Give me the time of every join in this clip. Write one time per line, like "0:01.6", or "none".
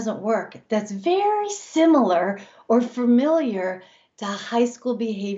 none